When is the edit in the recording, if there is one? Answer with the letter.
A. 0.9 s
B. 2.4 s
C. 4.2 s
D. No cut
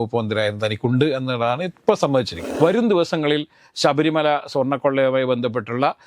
B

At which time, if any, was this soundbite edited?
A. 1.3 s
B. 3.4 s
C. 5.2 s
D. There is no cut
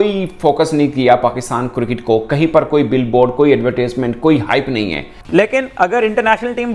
C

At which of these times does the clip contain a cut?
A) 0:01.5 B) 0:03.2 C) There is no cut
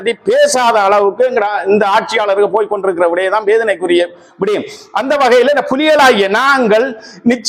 C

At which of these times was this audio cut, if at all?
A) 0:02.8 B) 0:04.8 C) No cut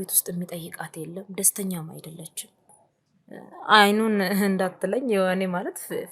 A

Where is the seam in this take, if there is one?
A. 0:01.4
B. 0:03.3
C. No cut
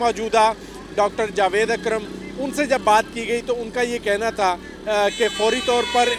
C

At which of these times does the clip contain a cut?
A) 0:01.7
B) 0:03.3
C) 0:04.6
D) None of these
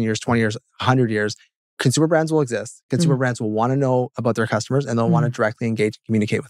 D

